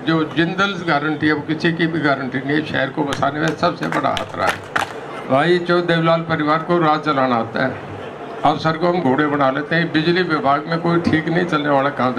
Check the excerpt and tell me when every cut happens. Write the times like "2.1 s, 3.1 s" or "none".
5.0 s

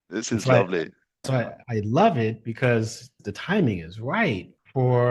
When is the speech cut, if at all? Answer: 1.3 s, 3.2 s

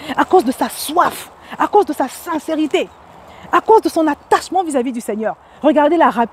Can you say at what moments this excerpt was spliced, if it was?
none

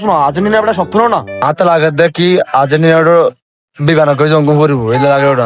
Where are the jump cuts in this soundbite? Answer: 1.4 s

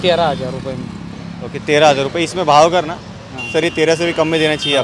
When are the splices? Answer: none

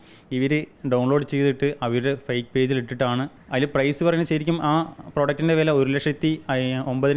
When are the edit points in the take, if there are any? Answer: 3.4 s

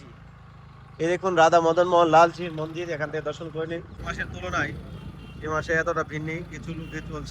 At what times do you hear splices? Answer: 4.0 s

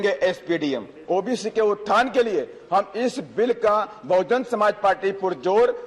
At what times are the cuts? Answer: 1.0 s

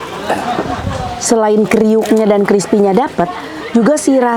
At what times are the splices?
none

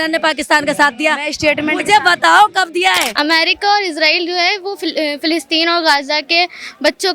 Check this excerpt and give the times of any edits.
3.1 s

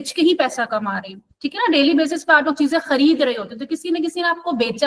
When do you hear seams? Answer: none

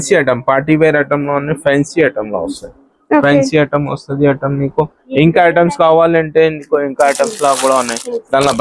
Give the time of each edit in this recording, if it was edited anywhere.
none

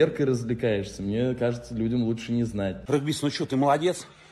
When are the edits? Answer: 2.8 s

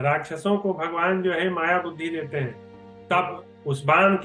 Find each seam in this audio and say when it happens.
2.9 s

